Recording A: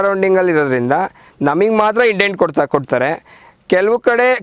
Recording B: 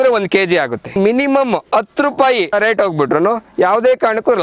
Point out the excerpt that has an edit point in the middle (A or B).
B